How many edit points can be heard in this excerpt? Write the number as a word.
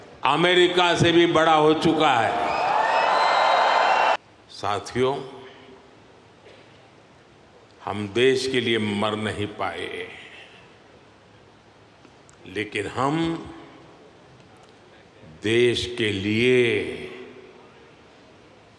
one